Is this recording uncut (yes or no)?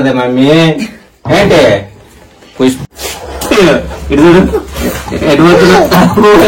no